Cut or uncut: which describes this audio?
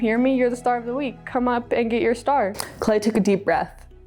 cut